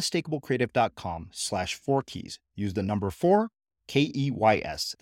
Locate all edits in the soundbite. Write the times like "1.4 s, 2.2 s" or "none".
none